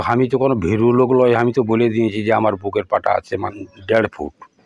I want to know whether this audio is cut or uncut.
cut